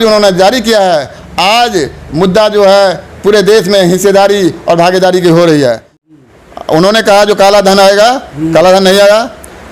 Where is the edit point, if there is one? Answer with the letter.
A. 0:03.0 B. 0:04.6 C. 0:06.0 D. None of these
C